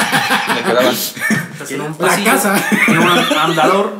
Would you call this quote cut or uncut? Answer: cut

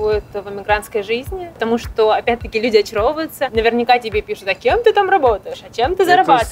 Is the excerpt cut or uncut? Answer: cut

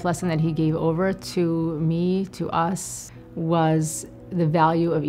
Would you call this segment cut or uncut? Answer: uncut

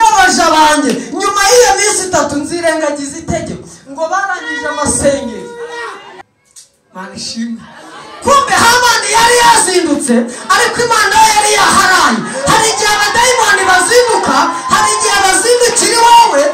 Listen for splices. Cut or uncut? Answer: cut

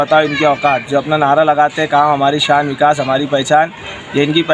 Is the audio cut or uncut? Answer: uncut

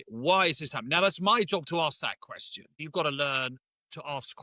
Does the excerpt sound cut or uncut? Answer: cut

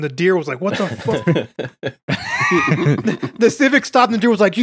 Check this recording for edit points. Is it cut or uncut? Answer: cut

